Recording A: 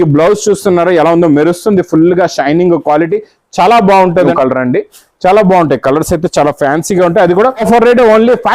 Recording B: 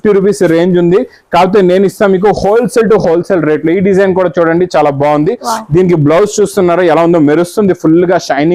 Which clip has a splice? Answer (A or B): A